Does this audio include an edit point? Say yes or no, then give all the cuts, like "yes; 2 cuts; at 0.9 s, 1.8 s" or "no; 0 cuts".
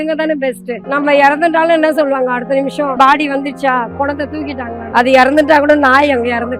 yes; 3 cuts; at 0.8 s, 2.9 s, 4.8 s